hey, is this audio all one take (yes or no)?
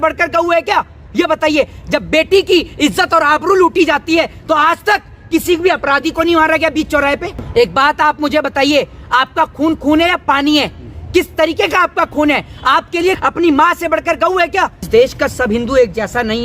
no